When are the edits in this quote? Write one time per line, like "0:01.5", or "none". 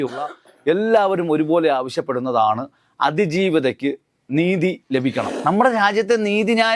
0:05.3